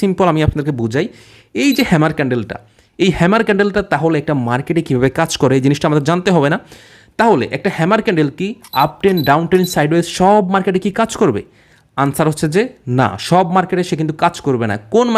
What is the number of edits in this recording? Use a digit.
0